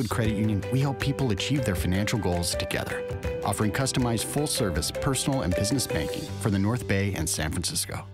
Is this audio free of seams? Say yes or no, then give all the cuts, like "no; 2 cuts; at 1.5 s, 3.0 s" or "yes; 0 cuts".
yes; 0 cuts